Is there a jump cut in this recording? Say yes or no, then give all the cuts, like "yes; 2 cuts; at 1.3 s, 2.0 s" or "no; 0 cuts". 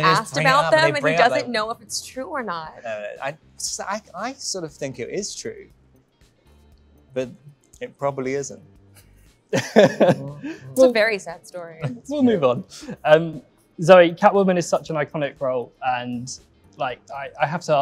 no; 0 cuts